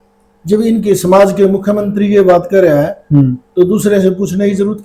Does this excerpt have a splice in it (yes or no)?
no